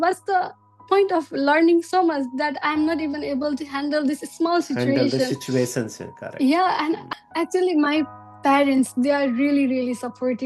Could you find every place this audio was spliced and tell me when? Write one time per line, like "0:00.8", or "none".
0:07.1